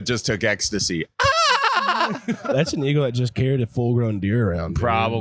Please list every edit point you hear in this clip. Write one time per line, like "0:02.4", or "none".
0:02.4

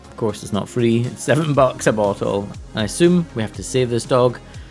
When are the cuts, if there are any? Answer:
0:02.5

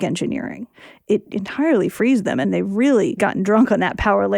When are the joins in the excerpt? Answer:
0:01.1
0:02.4
0:03.2

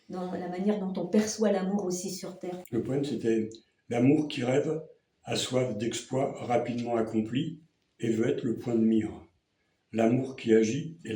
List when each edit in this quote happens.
0:02.5

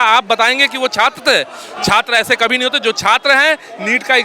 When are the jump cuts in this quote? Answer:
none

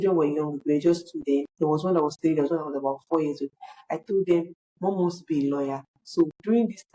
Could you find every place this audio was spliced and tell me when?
0:01.5

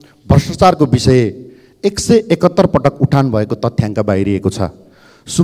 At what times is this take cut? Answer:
none

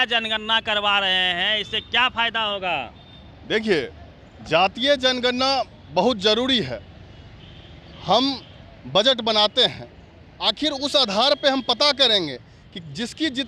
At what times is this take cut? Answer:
none

